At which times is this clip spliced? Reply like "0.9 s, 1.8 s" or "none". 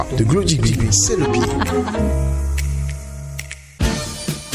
3.6 s